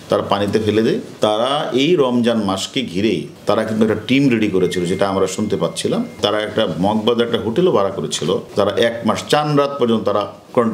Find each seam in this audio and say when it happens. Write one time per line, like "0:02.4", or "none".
0:01.1
0:03.3
0:06.2
0:08.5